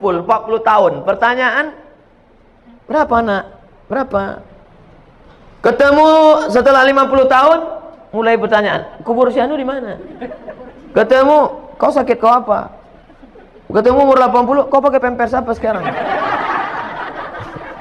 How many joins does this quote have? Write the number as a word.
zero